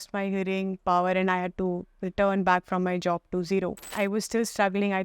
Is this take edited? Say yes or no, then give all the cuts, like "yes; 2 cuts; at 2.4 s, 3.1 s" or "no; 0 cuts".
yes; 1 cut; at 3.9 s